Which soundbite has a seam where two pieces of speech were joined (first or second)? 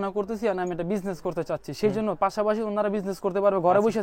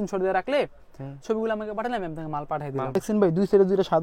second